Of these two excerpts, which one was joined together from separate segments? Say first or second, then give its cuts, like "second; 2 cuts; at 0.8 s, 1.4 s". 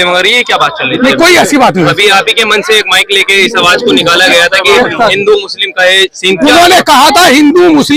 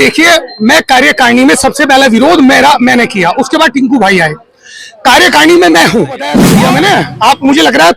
second; 1 cut; at 6.5 s